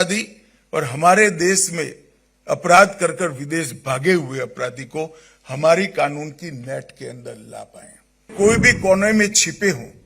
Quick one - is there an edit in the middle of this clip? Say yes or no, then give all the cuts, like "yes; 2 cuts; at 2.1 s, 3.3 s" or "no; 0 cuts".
yes; 1 cut; at 8.3 s